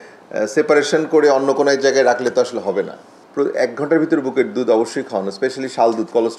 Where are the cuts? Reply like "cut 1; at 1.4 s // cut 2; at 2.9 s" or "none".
none